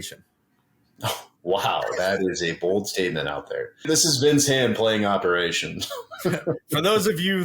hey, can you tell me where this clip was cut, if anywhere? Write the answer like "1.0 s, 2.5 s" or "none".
3.9 s